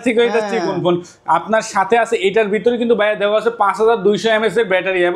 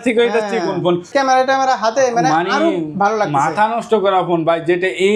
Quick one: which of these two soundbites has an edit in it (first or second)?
second